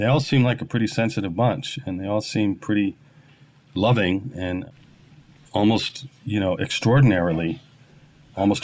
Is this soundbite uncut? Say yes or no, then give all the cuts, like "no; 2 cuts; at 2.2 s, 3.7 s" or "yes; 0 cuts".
yes; 0 cuts